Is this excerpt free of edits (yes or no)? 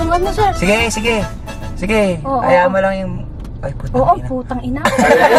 yes